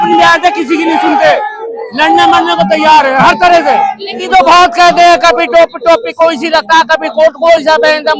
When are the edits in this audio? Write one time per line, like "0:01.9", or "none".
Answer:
0:04.2